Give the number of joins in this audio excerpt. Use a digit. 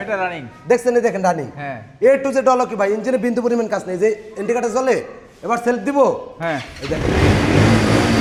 0